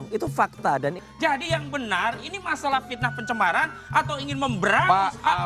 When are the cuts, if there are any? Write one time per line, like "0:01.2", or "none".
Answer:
0:01.0